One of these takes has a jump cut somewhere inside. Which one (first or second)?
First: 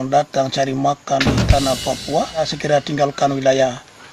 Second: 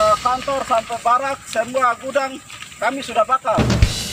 first